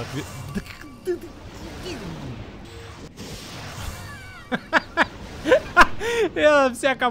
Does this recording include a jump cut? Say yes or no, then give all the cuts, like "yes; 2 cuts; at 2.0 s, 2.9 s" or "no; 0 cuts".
yes; 1 cut; at 2.6 s